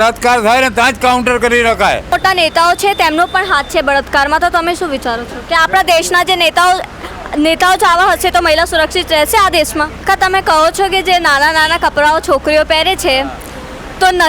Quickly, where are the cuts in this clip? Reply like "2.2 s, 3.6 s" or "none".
2.1 s, 10.0 s